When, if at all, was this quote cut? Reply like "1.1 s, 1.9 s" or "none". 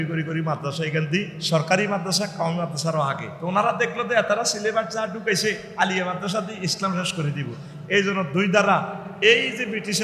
1.4 s, 3.3 s, 5.7 s